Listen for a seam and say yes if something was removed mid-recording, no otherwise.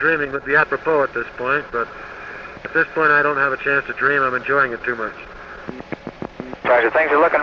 no